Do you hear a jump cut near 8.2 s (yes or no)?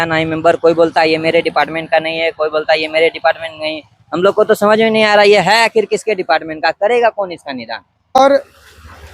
yes